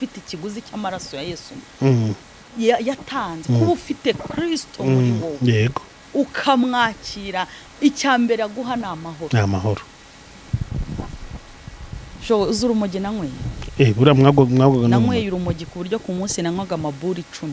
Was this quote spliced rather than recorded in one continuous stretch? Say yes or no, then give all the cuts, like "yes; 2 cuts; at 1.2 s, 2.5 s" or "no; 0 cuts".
no; 0 cuts